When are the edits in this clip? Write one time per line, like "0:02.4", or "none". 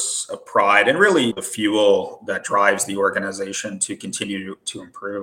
0:01.4